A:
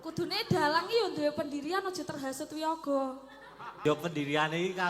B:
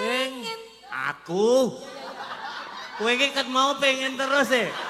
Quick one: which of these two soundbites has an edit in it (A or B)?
A